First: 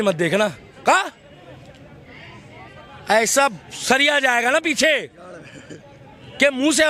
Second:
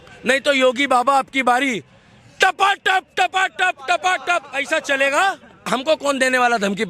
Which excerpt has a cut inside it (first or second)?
second